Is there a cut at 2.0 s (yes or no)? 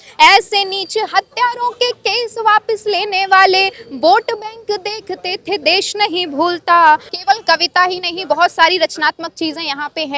no